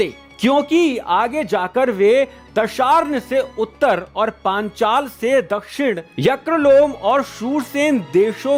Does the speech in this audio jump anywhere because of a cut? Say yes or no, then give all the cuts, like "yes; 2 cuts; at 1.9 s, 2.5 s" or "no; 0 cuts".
no; 0 cuts